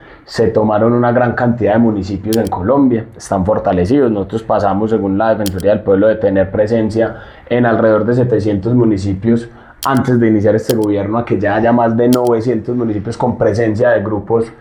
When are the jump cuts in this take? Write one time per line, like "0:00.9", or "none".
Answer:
none